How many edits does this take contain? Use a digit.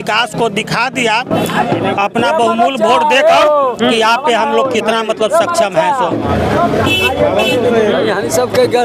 0